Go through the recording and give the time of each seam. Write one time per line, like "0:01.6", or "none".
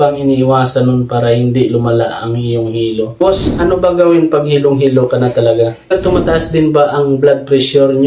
0:03.2
0:06.0